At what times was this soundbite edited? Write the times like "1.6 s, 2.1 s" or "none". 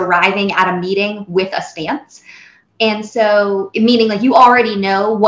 2.6 s